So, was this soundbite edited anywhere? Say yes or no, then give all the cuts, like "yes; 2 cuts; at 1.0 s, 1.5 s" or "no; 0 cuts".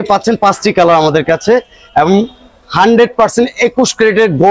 no; 0 cuts